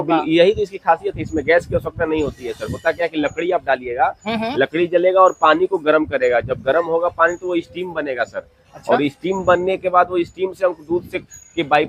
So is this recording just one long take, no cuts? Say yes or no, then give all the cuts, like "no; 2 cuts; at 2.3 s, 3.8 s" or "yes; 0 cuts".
yes; 0 cuts